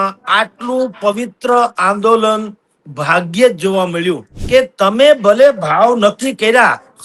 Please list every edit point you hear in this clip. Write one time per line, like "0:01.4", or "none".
0:04.3